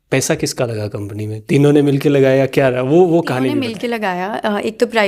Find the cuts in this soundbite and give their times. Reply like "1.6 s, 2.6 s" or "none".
3.7 s